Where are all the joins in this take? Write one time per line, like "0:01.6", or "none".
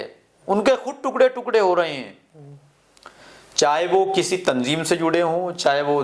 none